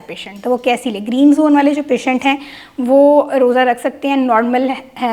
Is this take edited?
no; 0 cuts

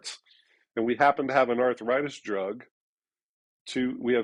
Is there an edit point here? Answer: no; 0 cuts

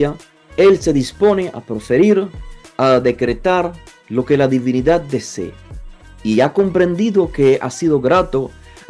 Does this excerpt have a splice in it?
no; 0 cuts

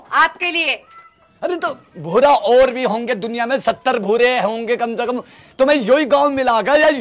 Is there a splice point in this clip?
no; 0 cuts

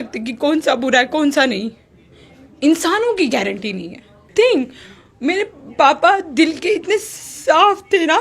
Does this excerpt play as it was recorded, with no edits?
no; 1 cut; at 4.3 s

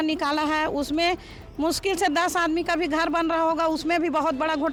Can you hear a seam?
no; 0 cuts

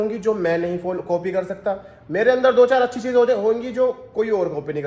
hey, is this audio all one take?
yes; 0 cuts

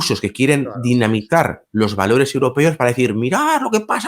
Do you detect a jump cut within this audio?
no; 0 cuts

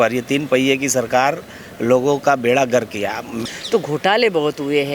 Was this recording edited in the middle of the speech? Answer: yes; 1 cut; at 3.4 s

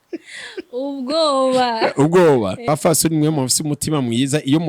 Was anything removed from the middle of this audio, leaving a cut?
yes; 1 cut; at 2.7 s

